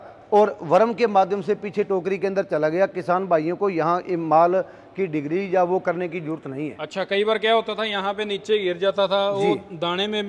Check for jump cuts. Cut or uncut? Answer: uncut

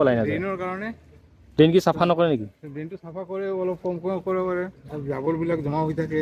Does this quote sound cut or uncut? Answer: uncut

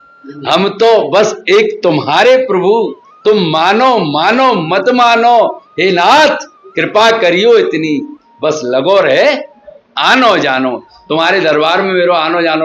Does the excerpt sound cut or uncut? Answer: uncut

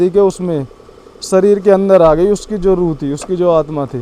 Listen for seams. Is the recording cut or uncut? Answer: uncut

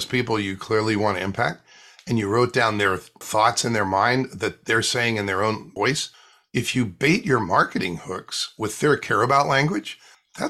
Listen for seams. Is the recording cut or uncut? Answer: cut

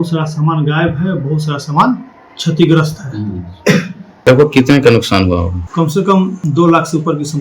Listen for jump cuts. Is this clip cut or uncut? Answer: cut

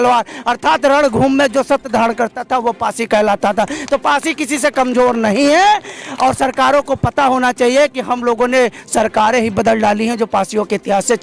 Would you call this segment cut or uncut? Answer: uncut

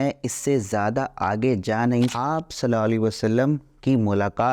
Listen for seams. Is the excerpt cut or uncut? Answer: cut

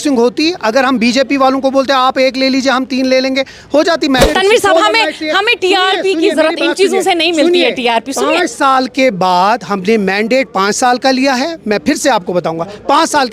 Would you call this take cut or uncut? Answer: cut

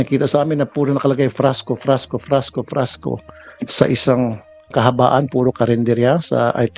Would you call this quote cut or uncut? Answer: cut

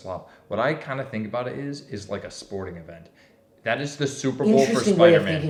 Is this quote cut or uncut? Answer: uncut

